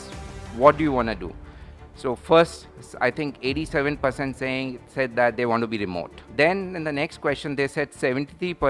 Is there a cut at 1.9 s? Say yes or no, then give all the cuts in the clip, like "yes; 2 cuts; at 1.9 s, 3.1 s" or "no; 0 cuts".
no; 1 cut; at 6.2 s